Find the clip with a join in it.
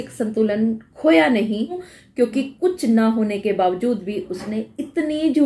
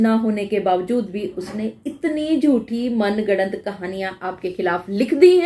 first; 1 cut; at 2.0 s

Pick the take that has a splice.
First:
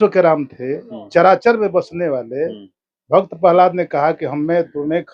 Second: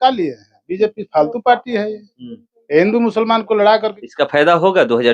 second; 1 cut; at 4.0 s

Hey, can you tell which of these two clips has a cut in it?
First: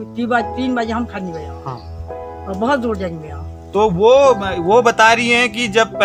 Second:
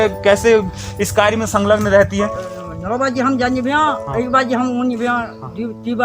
second; 1 cut; at 2.4 s

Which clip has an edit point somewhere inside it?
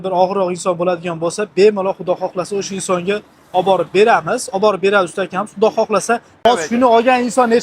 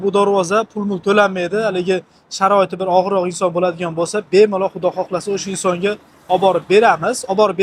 first; 1 cut; at 6.4 s

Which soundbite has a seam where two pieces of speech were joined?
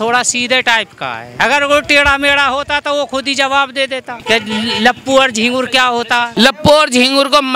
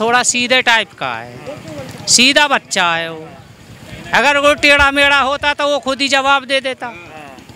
first; 3 cuts; at 1.2 s, 4.1 s, 6.3 s

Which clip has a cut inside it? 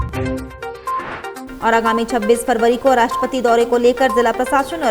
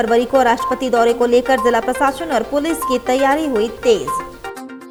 first; 1 cut; at 1.4 s

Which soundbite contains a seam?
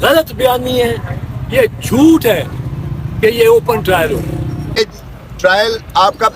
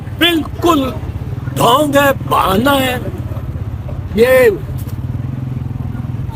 first; 1 cut; at 4.8 s

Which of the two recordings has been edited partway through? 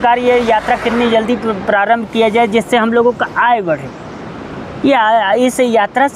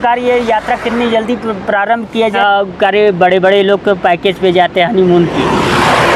second; 1 cut; at 2.4 s

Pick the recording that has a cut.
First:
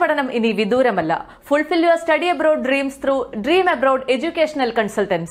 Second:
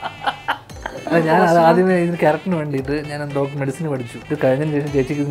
second; 2 cuts; at 0.9 s, 4.1 s

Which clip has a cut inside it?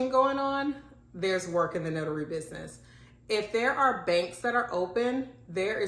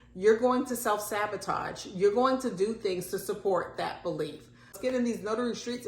second; 1 cut; at 4.8 s

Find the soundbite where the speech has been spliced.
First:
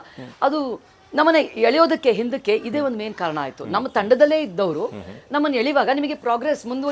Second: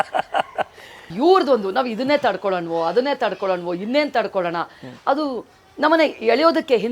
second; 1 cut; at 1.1 s

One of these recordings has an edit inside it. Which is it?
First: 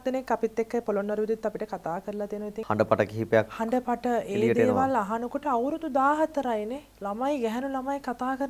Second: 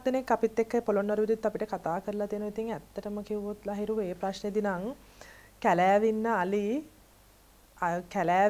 first; 2 cuts; at 2.5 s, 6.9 s

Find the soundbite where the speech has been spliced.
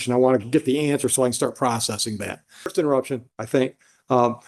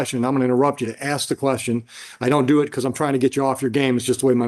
first; 1 cut; at 2.7 s

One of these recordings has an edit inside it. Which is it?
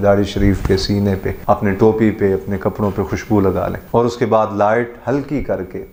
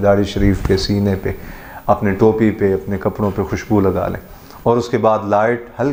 first; 2 cuts; at 1.3 s, 3.8 s

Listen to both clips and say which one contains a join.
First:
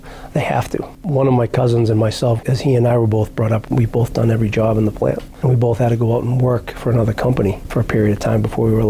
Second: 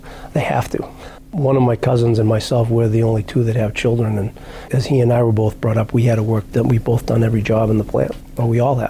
first; 4 cuts; at 0.9 s, 2.4 s, 3.7 s, 5.3 s

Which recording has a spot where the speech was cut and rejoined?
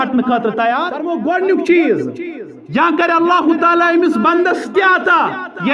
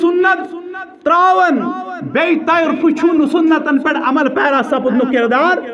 first; 1 cut; at 1.1 s

